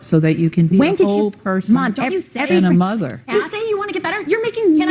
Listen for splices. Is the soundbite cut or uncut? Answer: uncut